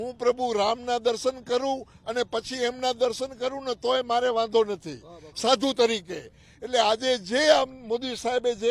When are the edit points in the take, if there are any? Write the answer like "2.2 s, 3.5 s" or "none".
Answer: none